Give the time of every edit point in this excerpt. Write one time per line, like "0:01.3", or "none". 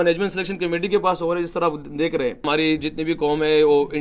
0:02.5